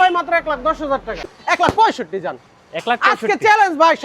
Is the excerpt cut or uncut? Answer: cut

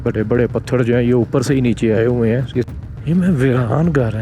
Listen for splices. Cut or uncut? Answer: cut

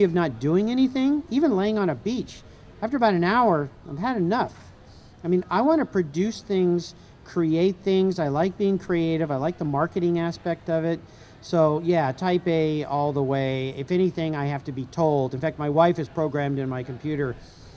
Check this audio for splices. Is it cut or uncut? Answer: uncut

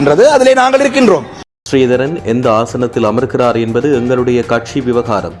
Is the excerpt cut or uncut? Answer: cut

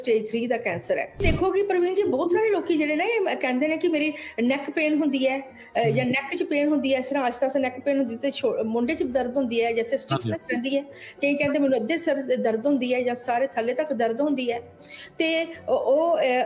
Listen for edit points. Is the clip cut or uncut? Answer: cut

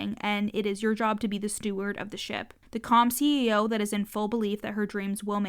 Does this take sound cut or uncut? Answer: cut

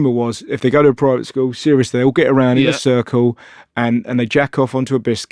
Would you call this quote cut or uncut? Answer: uncut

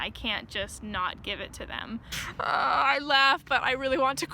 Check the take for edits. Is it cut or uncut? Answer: cut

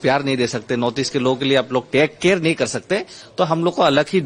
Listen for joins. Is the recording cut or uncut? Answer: uncut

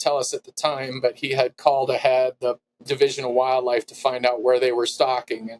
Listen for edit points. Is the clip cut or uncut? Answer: cut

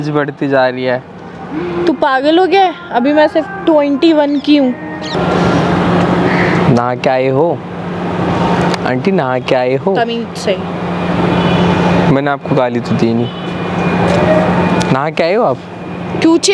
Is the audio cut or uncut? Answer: cut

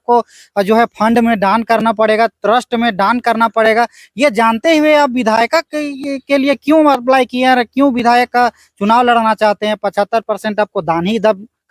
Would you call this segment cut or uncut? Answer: uncut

